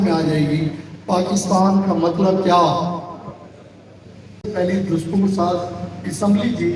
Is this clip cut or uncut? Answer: cut